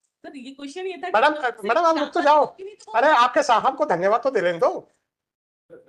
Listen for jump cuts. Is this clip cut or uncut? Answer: uncut